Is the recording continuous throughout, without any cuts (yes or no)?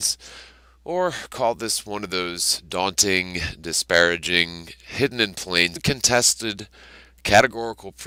yes